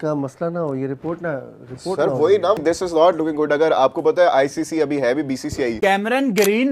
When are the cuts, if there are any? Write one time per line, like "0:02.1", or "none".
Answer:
0:02.6
0:05.8